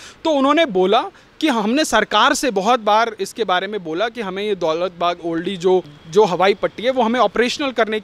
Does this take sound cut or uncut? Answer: uncut